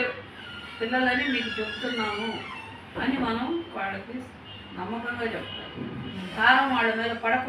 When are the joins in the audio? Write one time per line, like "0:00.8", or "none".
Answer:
0:06.2